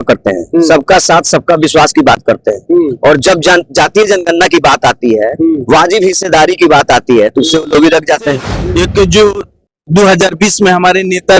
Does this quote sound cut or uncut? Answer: cut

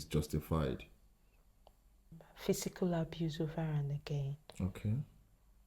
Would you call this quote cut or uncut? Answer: cut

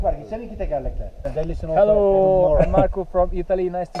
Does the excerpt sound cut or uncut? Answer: cut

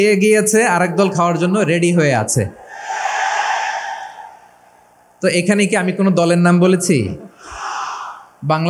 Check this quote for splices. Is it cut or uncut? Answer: uncut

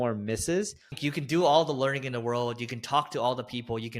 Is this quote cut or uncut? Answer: cut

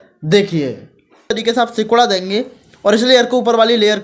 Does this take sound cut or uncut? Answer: cut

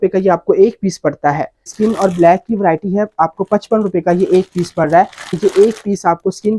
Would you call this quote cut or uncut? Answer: cut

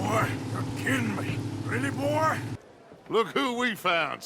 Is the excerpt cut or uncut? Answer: cut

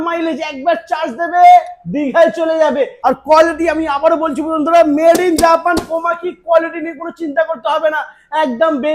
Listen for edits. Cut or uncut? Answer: cut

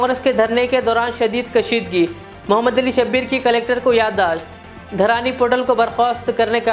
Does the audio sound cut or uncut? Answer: uncut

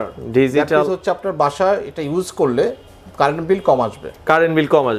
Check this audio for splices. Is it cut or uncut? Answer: uncut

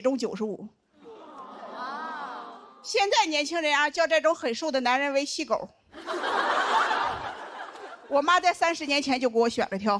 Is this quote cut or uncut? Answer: uncut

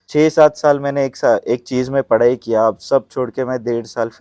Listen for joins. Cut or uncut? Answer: uncut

